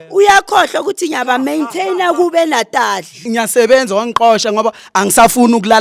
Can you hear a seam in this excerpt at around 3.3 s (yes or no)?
yes